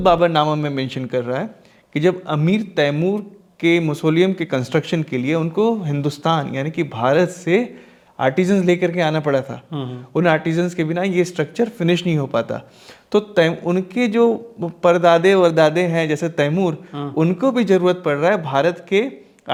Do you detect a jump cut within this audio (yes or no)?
no